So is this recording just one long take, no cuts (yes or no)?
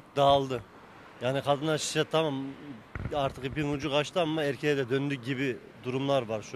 yes